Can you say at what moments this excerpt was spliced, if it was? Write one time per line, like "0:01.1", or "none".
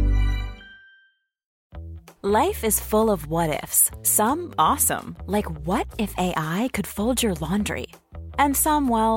0:01.5